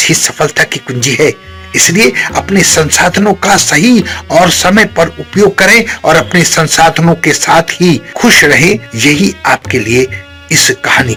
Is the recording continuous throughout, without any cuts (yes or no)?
yes